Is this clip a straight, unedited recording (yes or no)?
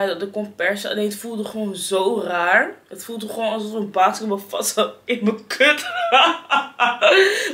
yes